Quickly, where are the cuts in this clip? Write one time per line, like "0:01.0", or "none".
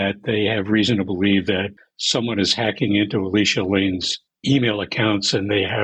none